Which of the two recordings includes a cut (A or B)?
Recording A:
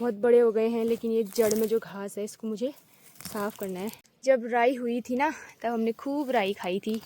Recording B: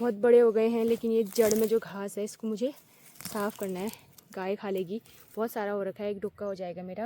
A